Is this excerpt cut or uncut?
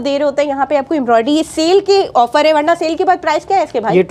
uncut